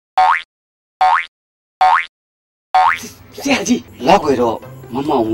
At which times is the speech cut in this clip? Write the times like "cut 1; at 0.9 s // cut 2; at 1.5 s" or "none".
cut 1; at 3.9 s